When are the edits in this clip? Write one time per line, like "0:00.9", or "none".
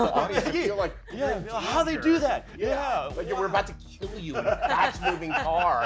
none